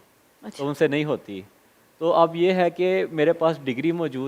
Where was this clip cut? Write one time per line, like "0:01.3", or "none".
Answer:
none